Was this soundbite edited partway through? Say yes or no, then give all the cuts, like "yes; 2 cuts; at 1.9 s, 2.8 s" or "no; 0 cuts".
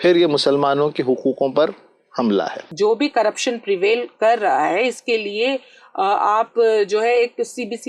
yes; 1 cut; at 2.7 s